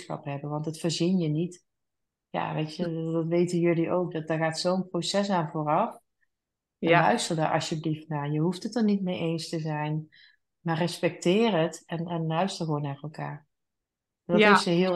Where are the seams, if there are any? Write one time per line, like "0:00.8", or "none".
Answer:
none

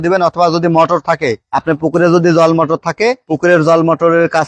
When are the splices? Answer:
none

